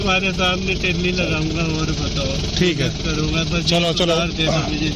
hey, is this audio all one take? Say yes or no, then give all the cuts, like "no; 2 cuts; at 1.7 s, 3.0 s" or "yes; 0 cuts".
yes; 0 cuts